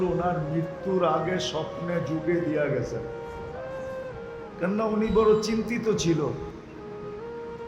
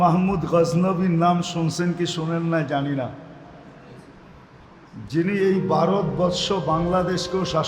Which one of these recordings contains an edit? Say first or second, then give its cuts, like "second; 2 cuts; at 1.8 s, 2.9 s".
first; 3 cuts; at 3.0 s, 4.6 s, 6.8 s